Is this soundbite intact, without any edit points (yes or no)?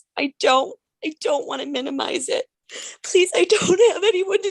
no